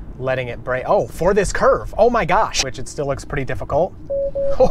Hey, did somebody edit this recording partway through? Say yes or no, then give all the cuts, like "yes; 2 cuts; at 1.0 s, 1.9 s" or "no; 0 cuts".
yes; 1 cut; at 2.6 s